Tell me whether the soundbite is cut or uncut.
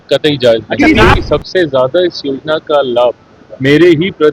cut